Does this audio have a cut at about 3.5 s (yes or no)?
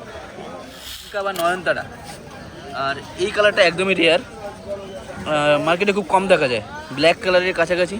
no